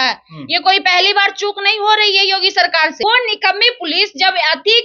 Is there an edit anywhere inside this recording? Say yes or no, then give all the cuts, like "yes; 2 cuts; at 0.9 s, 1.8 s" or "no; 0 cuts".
yes; 1 cut; at 3.0 s